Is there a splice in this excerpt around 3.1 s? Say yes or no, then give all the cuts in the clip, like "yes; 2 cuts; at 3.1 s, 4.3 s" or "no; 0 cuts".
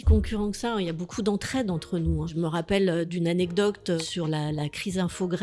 yes; 3 cuts; at 2.3 s, 3.1 s, 4.0 s